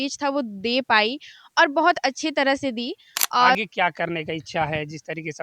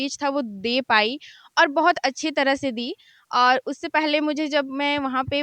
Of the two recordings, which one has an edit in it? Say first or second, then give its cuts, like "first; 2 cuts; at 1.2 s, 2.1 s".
first; 1 cut; at 3.5 s